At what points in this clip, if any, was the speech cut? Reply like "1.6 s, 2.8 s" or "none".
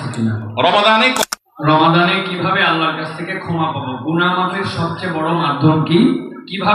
1.2 s